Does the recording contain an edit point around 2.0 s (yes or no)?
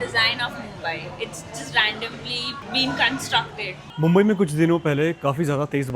no